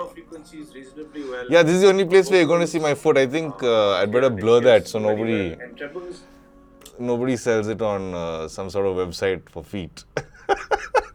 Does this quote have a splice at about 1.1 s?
no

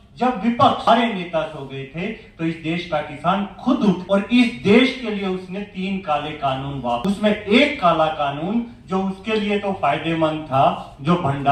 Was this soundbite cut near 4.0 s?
yes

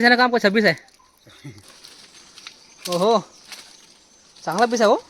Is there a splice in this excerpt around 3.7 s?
no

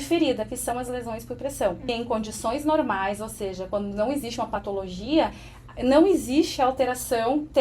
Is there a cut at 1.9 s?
yes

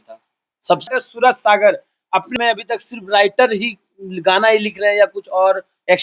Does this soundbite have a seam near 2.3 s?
yes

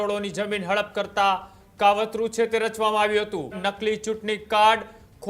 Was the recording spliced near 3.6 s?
yes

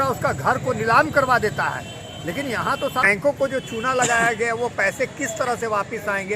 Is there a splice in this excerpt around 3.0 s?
yes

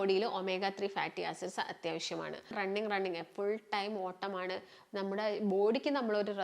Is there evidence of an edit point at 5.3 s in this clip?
no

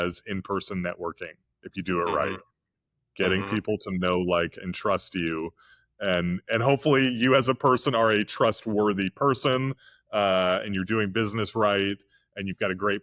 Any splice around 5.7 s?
no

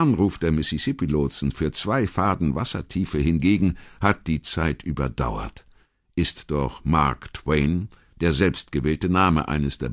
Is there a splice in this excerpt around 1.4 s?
no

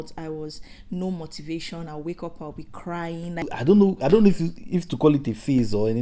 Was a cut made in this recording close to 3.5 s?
yes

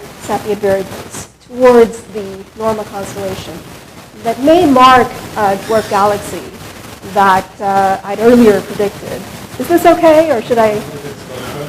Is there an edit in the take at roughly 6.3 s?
yes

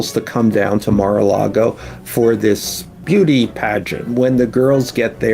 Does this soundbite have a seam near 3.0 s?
yes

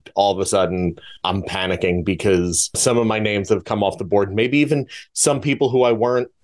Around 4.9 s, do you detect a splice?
no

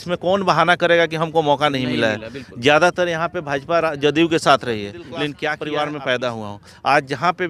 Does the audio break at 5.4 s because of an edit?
yes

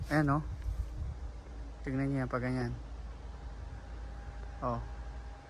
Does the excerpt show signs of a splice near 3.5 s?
no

